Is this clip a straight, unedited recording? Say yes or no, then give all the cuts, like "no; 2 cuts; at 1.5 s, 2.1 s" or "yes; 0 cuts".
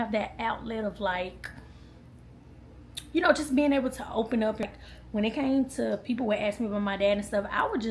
no; 1 cut; at 4.6 s